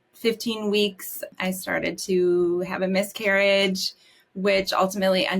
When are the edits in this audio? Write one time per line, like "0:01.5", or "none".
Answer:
0:01.3